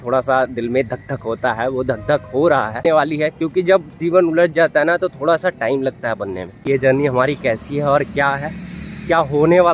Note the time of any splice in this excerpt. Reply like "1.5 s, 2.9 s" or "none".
3.2 s, 6.6 s